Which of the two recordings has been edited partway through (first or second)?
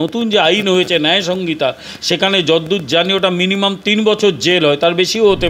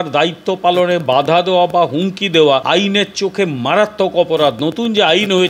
second